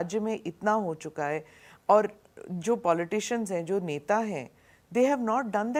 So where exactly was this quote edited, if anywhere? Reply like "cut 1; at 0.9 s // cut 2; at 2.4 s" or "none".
none